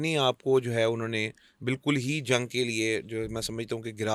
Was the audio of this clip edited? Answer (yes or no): no